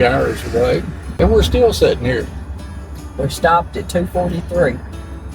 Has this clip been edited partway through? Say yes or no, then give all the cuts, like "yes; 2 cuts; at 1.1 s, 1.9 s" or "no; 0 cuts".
yes; 1 cut; at 1.0 s